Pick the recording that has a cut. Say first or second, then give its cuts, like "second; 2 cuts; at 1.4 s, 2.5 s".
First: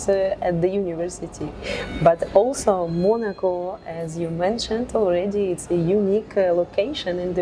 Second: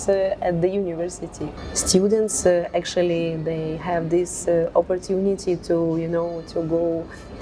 second; 1 cut; at 1.6 s